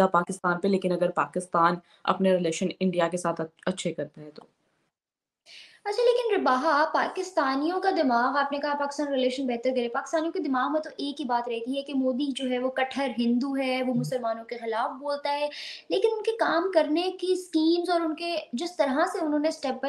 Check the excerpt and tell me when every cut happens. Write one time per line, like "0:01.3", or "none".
none